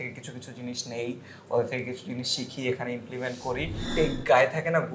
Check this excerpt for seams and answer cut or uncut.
cut